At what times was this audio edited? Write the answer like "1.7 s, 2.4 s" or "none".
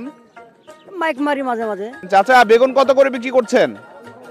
2.0 s